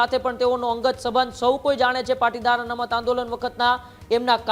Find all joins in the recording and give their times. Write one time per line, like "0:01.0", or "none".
none